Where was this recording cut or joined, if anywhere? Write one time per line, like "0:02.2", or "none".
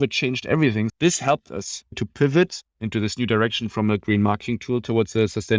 0:00.9
0:02.0